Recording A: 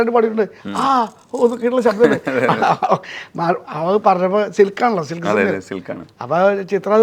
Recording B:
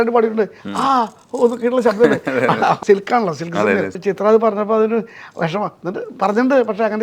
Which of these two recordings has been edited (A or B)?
B